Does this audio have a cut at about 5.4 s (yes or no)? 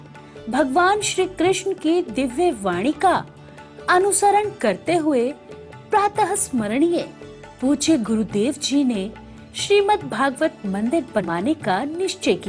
no